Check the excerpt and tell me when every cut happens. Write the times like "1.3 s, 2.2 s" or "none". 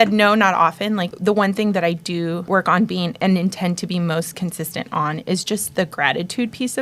1.1 s, 2.4 s